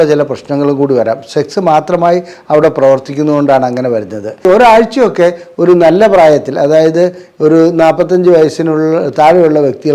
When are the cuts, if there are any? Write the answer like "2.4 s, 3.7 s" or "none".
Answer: 4.4 s